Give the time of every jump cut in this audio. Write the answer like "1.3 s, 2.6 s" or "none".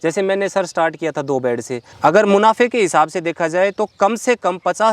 1.8 s